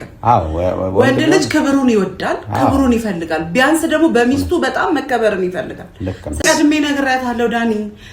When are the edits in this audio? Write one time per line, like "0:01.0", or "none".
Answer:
0:06.4